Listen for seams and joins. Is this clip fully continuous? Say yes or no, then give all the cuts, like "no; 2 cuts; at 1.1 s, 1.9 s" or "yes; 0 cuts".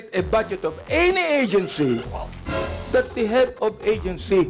yes; 0 cuts